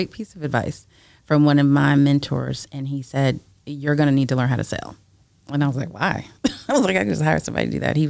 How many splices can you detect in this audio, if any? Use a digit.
0